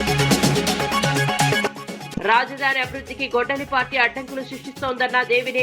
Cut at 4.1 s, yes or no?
no